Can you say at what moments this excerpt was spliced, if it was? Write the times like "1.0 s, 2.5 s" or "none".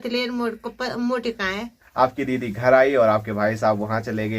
1.7 s